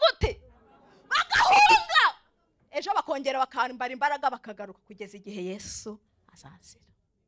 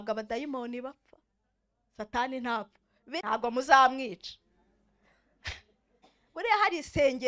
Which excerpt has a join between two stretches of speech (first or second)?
second